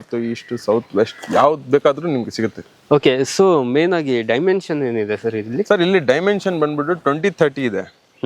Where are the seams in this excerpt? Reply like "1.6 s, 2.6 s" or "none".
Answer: none